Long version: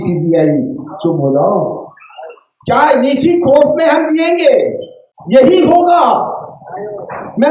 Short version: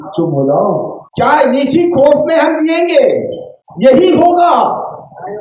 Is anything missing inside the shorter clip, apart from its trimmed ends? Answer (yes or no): yes